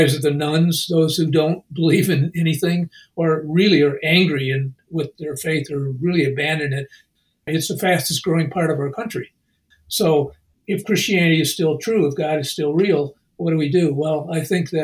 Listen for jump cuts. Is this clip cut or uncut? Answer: cut